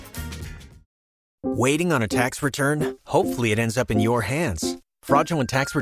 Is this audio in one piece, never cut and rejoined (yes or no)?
no